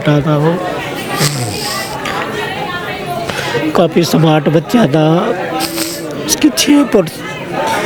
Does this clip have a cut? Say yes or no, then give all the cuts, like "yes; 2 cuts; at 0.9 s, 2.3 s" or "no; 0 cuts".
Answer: no; 0 cuts